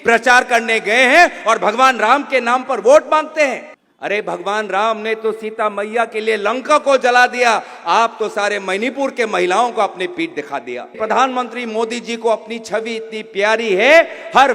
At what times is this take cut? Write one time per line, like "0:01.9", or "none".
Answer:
0:03.7
0:10.9